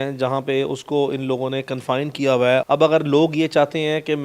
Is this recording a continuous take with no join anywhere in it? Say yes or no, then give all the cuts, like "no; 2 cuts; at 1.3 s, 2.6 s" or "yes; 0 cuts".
no; 1 cut; at 2.6 s